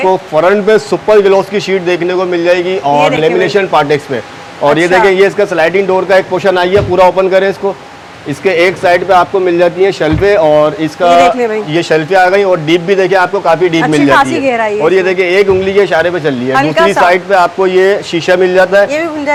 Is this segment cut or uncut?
uncut